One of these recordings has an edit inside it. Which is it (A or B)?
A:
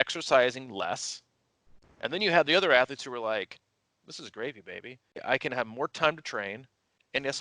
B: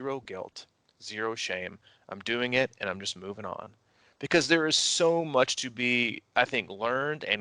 A